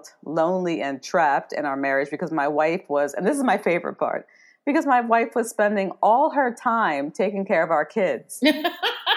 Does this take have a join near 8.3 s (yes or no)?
yes